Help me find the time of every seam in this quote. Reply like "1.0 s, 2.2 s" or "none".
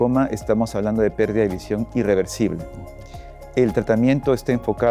none